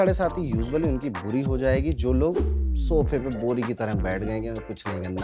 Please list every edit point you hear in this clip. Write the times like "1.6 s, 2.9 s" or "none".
none